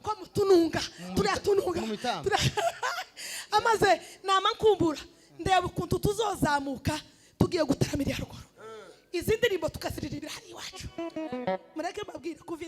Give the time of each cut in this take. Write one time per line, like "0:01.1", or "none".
0:11.0